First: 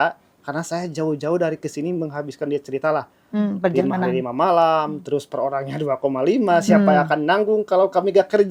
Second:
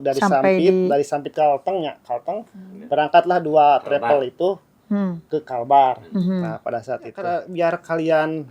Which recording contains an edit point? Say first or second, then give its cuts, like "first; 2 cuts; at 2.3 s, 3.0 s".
second; 1 cut; at 7.2 s